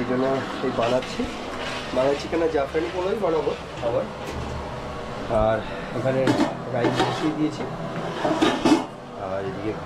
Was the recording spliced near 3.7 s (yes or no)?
no